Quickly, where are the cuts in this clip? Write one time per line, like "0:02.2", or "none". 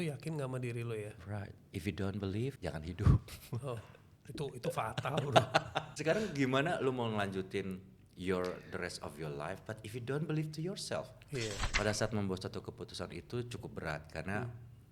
0:02.6
0:05.9
0:11.6